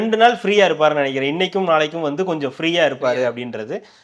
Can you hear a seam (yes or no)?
no